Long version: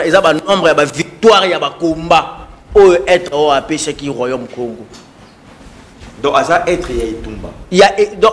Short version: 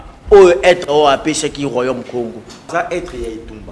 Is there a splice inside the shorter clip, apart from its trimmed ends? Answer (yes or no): yes